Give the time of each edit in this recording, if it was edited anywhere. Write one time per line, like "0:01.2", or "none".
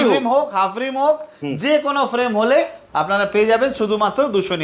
0:02.8